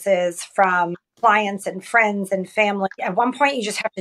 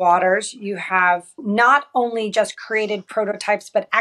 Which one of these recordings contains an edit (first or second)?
first